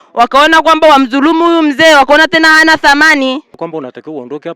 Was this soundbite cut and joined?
yes; 1 cut; at 3.6 s

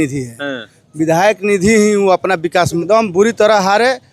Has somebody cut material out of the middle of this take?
yes; 1 cut; at 2.8 s

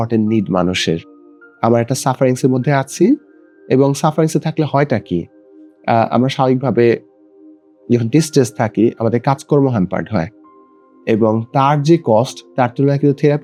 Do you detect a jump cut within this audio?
no; 0 cuts

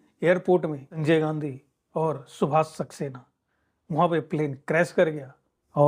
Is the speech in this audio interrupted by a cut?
no; 0 cuts

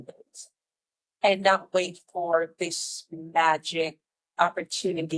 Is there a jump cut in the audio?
no; 0 cuts

